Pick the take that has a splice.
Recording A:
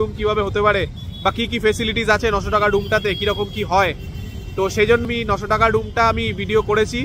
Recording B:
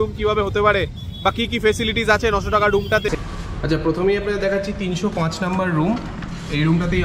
B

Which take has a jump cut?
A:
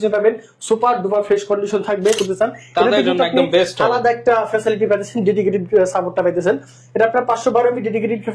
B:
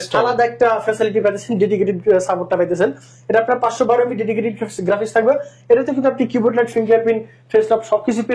A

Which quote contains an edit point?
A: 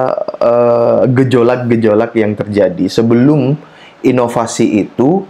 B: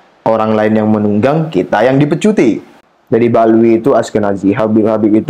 B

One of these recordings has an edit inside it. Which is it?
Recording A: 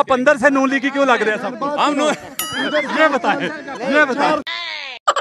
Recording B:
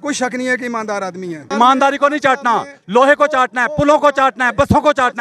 B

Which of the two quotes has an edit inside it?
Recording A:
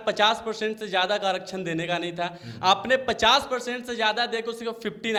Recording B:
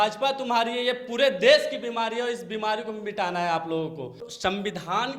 B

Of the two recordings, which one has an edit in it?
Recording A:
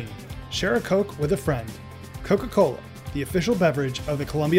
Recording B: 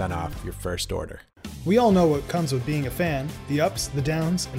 B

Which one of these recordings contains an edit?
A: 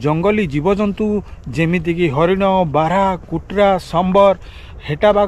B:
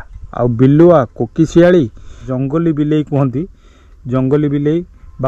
B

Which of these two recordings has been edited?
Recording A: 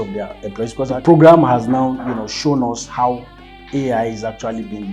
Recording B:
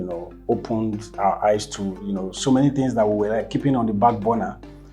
A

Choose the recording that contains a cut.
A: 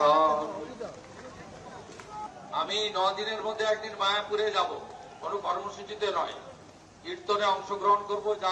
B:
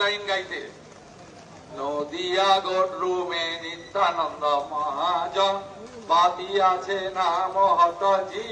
A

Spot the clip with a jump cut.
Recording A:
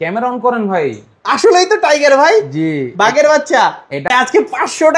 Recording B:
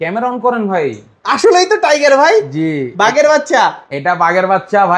A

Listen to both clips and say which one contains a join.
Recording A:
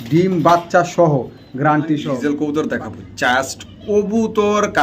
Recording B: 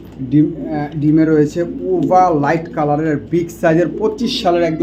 A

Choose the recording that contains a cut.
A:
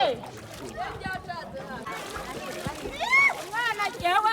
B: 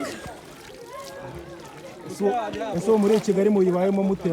A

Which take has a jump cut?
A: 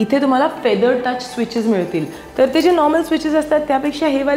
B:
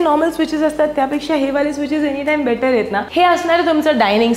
B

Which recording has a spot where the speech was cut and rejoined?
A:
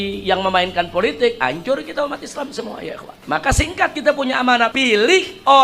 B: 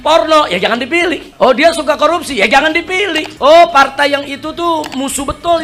A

